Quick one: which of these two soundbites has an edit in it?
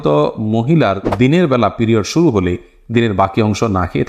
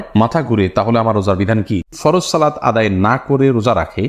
second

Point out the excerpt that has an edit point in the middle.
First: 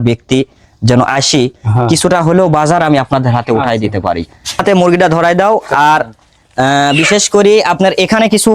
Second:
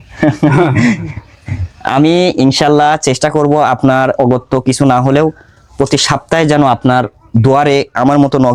first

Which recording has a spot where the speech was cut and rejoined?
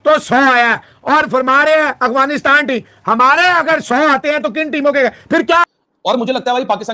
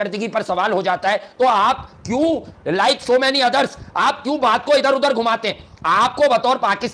first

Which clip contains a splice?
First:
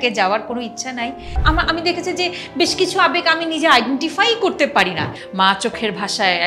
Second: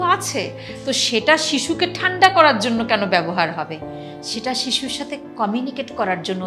first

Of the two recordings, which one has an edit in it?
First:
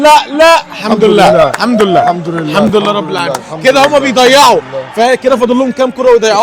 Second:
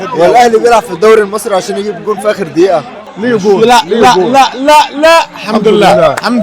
second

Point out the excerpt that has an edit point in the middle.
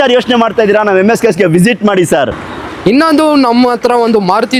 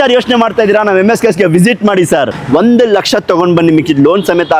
second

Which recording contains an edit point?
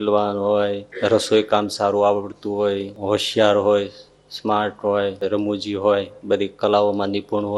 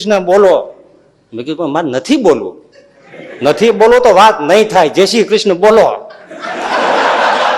first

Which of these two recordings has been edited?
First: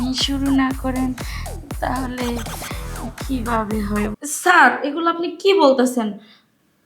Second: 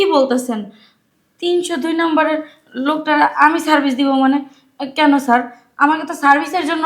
first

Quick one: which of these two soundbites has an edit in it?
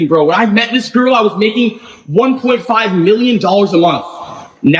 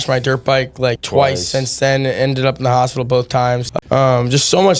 second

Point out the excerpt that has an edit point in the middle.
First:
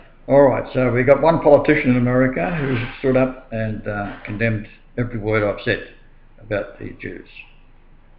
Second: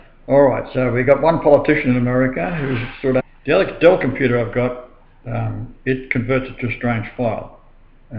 first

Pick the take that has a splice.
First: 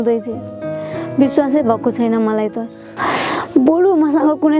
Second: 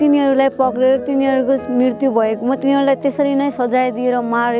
first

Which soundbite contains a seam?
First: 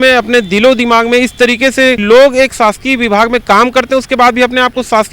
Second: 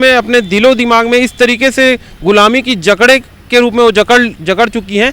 first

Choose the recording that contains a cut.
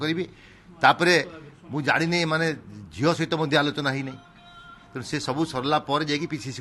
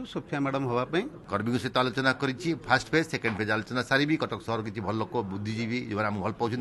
second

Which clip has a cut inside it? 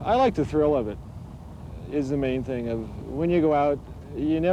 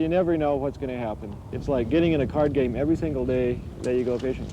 second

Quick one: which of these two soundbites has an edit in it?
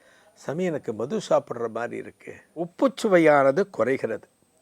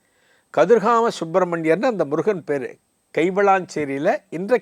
first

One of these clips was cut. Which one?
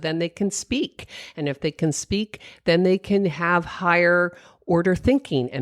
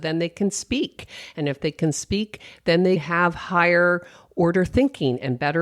second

